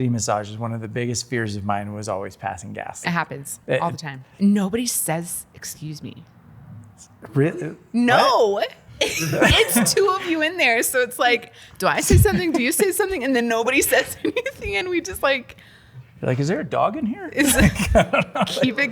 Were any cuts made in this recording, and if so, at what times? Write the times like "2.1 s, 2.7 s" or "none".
3.0 s, 4.3 s, 8.8 s